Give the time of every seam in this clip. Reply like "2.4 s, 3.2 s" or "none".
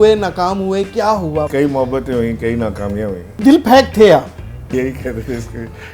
1.5 s, 3.4 s, 4.7 s